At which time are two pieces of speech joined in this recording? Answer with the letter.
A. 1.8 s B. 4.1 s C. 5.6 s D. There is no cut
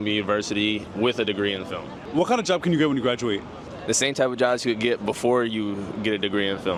D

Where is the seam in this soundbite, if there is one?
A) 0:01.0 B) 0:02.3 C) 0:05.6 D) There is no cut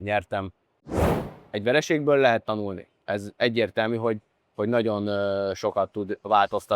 A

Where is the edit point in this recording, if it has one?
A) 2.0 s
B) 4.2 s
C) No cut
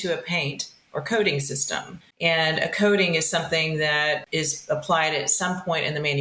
A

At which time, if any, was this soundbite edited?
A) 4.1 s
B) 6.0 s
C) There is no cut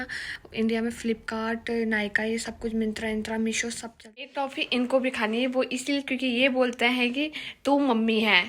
A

